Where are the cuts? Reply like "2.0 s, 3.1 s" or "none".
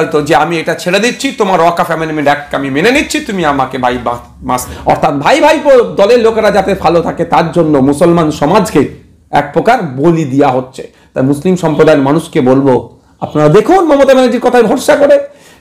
4.7 s

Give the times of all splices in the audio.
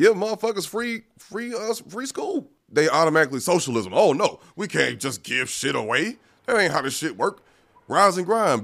2.6 s

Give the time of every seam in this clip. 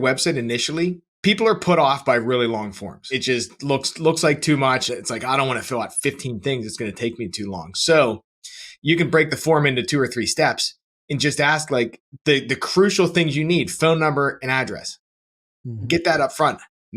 1.1 s, 3.1 s, 4.8 s

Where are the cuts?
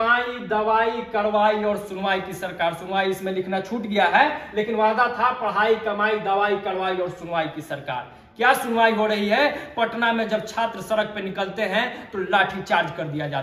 none

